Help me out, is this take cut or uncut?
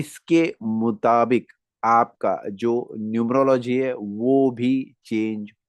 uncut